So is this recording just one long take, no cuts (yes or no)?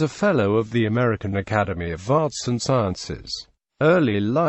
yes